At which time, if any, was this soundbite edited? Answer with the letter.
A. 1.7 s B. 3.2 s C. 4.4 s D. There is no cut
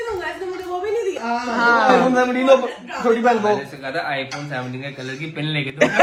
D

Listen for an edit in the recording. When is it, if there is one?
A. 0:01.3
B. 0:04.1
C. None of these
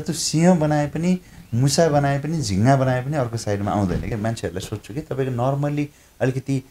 B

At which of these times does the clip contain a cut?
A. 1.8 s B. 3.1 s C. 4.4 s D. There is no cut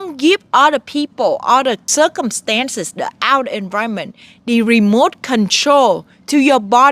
A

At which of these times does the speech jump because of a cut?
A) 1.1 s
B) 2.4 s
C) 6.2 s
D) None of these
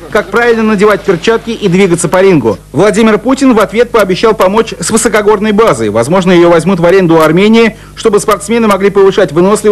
B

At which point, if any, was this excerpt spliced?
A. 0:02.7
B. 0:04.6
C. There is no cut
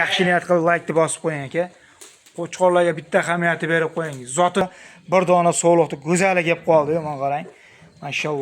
B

